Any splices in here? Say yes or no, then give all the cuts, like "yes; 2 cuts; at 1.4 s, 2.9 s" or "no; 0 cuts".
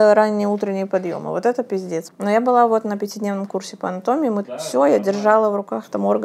yes; 2 cuts; at 2.1 s, 4.5 s